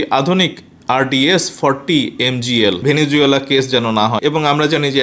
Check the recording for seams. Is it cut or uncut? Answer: cut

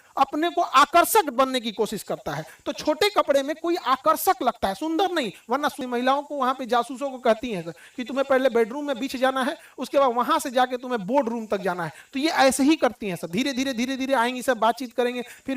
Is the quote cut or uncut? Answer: cut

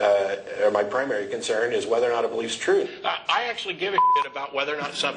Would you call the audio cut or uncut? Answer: cut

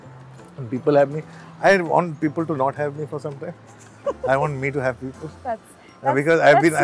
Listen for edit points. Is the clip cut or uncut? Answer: uncut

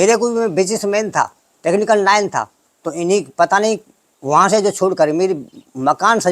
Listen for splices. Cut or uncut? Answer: uncut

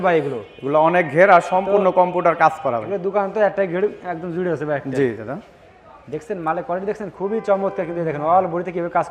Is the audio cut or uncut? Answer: uncut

